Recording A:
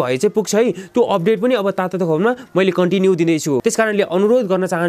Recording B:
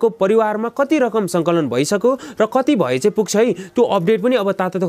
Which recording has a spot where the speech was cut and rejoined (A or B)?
A